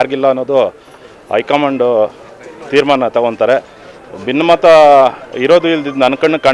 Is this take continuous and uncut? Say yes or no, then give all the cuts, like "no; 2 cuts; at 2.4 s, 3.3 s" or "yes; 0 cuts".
yes; 0 cuts